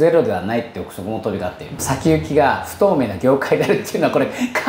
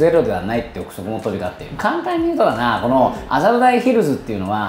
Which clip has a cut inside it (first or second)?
first